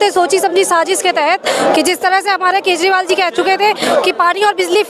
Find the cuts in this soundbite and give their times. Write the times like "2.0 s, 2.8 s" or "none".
none